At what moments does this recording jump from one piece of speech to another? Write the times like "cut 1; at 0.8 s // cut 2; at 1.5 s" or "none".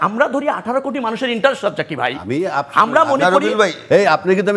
none